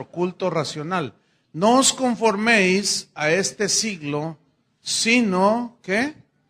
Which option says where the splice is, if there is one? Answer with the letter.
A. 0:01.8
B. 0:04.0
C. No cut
A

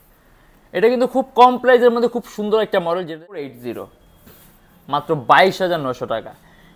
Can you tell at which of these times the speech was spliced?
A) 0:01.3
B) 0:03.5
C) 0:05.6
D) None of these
B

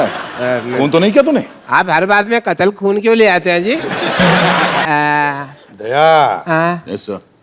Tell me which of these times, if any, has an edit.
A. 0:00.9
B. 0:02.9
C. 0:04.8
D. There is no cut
C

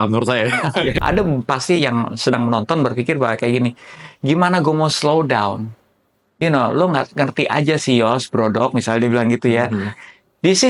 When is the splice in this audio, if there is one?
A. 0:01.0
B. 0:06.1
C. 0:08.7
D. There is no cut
A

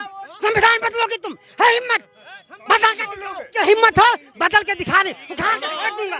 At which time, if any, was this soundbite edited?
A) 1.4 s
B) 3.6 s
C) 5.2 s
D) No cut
B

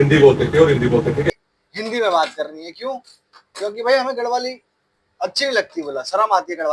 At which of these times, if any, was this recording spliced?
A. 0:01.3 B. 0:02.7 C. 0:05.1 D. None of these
A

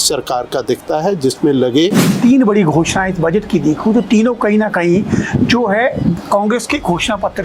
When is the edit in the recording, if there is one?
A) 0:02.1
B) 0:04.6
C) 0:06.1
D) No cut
A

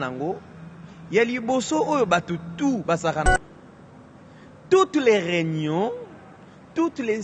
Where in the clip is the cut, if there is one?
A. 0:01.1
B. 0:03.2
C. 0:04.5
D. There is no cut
B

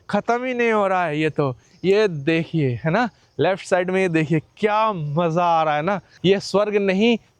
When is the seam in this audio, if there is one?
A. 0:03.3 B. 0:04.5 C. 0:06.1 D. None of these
C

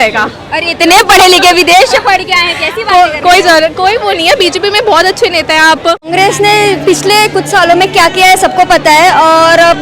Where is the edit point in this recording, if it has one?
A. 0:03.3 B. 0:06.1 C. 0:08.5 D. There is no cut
B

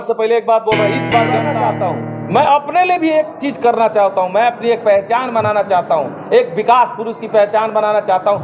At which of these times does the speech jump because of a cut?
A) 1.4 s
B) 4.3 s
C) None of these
A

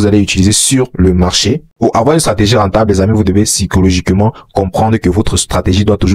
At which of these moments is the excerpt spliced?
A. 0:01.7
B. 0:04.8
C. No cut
A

